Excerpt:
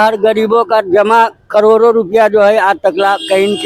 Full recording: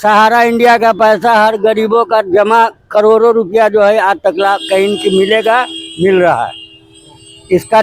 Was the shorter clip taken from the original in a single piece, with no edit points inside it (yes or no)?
yes